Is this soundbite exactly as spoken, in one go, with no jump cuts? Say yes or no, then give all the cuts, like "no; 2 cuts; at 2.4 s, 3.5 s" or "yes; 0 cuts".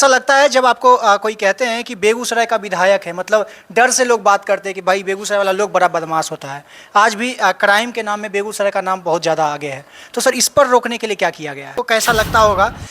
no; 1 cut; at 11.7 s